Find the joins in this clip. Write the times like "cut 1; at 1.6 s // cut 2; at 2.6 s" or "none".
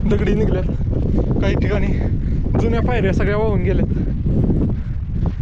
none